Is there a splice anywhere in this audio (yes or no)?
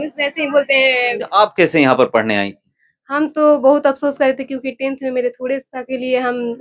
yes